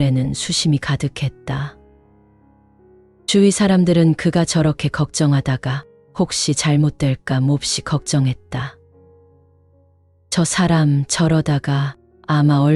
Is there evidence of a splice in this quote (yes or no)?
yes